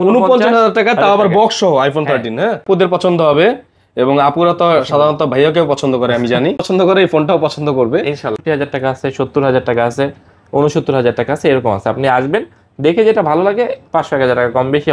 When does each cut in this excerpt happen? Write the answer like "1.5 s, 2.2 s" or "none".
2.6 s, 6.6 s, 8.4 s